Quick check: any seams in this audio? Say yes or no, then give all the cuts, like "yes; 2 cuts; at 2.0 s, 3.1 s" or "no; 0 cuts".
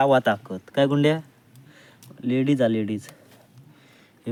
no; 0 cuts